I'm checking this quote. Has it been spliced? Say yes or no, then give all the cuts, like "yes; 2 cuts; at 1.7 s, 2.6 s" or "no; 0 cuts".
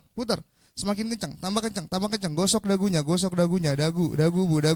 no; 0 cuts